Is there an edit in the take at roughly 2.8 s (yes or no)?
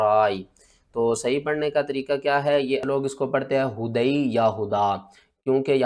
yes